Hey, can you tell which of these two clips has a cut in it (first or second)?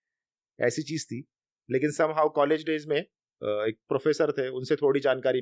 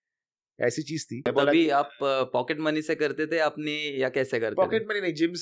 second